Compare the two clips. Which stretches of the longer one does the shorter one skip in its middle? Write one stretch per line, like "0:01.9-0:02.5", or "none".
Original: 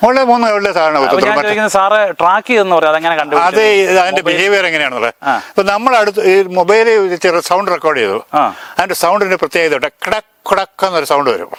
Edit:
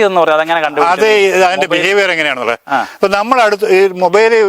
none